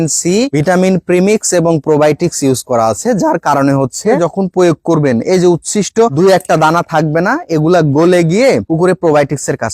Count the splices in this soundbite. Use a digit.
2